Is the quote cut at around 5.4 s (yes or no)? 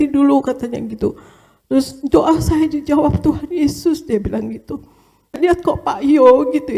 yes